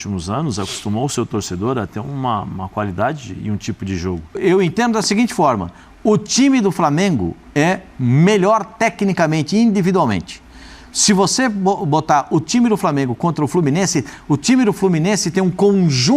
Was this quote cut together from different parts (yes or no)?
yes